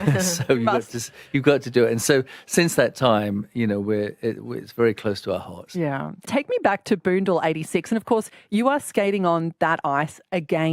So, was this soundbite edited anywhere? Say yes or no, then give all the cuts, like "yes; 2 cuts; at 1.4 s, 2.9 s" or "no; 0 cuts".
yes; 1 cut; at 6.3 s